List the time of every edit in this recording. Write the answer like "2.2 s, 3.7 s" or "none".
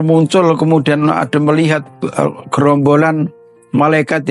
none

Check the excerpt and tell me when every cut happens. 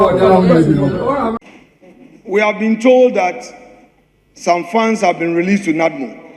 1.4 s

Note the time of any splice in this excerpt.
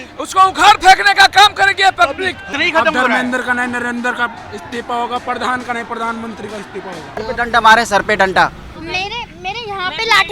2.4 s, 7.2 s

